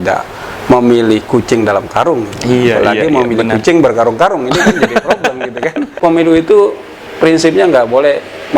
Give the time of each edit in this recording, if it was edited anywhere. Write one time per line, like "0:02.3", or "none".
0:06.0